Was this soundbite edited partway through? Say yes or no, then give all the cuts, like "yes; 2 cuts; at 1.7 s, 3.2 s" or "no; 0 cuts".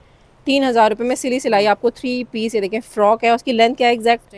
no; 0 cuts